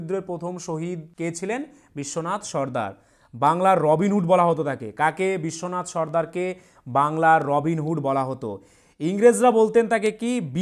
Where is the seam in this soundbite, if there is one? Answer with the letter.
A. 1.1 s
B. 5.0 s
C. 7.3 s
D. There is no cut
A